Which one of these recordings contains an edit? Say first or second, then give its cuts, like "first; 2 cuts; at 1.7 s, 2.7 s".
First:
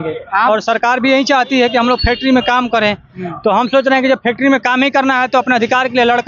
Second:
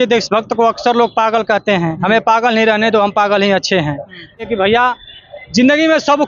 second; 1 cut; at 4.5 s